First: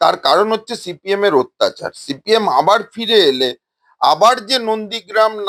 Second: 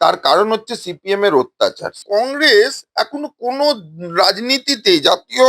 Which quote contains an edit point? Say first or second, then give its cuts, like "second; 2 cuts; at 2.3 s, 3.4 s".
second; 1 cut; at 1.9 s